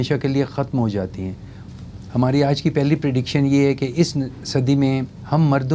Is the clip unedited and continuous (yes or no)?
yes